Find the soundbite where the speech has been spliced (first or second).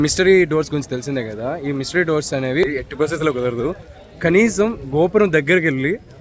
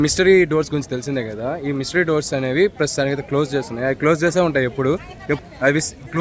first